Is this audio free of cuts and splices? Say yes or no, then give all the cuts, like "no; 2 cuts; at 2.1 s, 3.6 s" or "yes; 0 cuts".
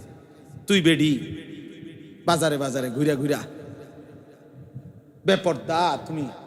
yes; 0 cuts